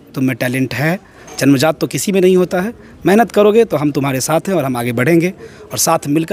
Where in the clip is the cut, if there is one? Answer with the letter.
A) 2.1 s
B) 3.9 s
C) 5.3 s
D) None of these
D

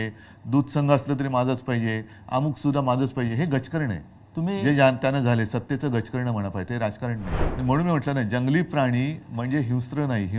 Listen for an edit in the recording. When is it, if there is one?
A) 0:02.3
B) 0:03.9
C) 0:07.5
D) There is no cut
C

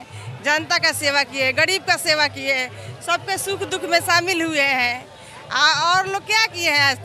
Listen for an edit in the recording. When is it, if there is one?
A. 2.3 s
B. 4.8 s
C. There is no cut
C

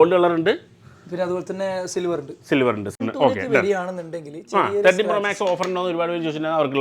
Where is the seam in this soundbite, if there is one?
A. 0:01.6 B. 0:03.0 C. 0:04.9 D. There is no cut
B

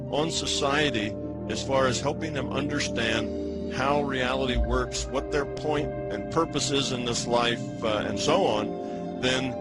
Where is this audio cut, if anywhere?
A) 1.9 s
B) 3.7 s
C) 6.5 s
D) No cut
C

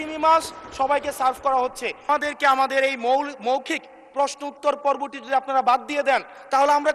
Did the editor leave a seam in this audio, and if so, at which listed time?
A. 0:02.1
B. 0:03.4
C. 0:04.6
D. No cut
A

